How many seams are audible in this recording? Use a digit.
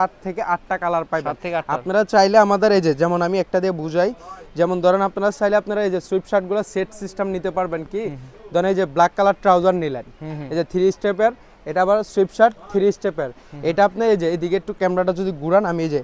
0